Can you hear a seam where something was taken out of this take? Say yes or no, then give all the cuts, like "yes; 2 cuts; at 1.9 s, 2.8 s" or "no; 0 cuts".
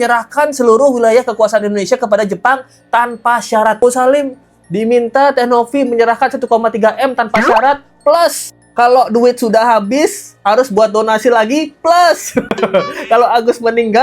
yes; 1 cut; at 3.8 s